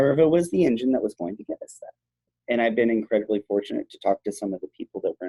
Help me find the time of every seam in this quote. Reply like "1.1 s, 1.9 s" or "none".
2.3 s